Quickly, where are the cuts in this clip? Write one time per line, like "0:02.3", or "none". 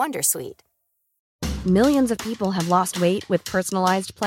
none